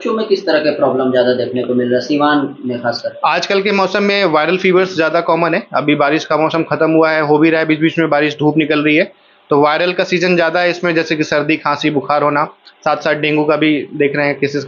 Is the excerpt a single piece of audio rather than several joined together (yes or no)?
yes